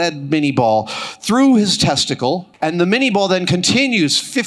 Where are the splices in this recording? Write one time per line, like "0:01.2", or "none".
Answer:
0:02.5